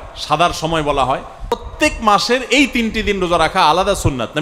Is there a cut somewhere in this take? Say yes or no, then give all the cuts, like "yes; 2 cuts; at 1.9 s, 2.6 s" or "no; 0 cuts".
yes; 1 cut; at 1.7 s